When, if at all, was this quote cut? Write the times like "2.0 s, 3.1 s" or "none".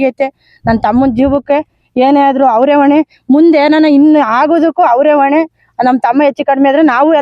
none